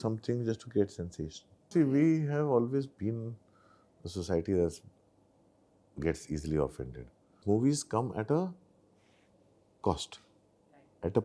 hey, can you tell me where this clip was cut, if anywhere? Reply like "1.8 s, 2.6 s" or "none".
1.7 s, 7.4 s